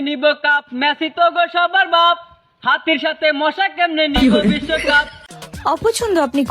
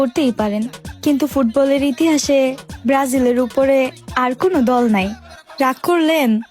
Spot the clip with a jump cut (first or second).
first